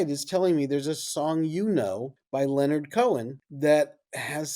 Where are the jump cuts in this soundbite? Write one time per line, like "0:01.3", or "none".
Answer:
0:02.1
0:03.4

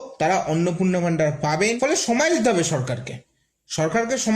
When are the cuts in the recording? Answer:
0:01.8

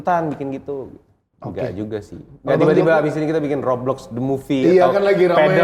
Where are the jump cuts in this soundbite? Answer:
none

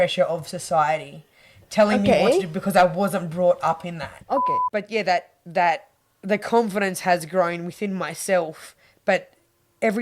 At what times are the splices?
0:04.6

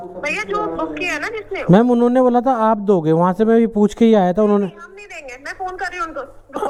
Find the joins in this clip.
none

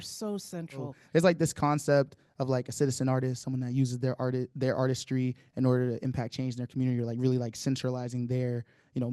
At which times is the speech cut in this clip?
0:01.0

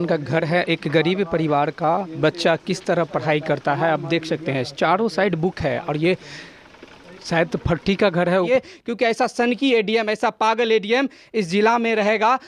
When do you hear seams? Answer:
0:08.5

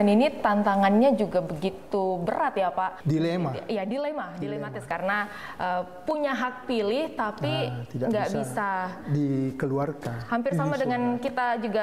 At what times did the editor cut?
0:03.0
0:04.9

